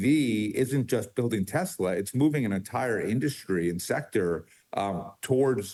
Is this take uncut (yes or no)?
yes